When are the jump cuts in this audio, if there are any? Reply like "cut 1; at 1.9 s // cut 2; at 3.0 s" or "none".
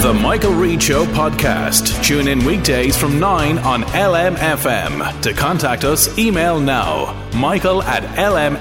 none